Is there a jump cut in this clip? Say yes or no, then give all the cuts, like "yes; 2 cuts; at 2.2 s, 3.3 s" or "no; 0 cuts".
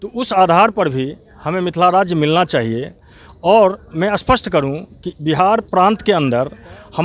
no; 0 cuts